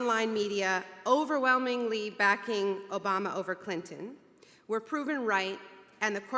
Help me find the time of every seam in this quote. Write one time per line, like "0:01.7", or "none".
0:05.1